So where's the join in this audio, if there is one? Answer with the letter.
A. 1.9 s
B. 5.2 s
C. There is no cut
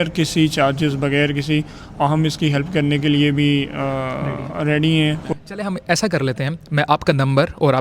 B